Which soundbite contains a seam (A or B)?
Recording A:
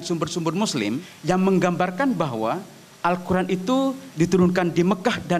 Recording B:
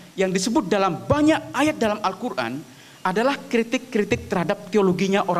A